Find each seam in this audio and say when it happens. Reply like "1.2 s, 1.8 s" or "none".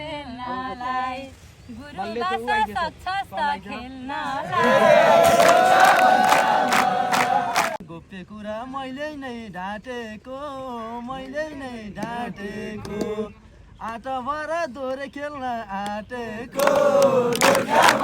7.9 s